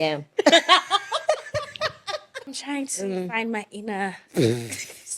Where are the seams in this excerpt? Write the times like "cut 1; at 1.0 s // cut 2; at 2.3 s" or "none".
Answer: cut 1; at 2.6 s

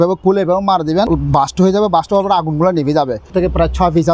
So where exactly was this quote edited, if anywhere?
cut 1; at 1.1 s // cut 2; at 3.3 s

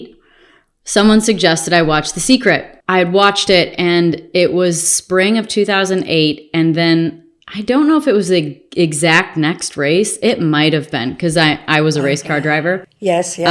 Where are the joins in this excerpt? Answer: cut 1; at 2.7 s

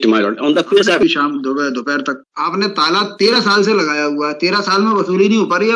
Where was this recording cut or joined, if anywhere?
cut 1; at 1.0 s // cut 2; at 2.2 s

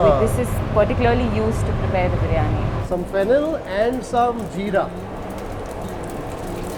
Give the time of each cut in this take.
cut 1; at 2.8 s

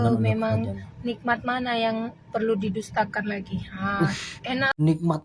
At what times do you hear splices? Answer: none

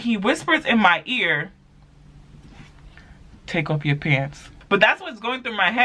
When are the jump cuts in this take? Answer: cut 1; at 4.5 s

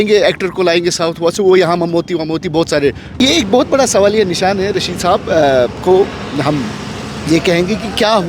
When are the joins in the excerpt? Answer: cut 1; at 3.2 s

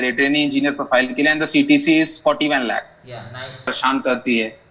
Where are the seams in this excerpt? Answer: cut 1; at 3.7 s

